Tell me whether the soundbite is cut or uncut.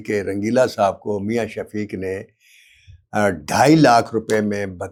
uncut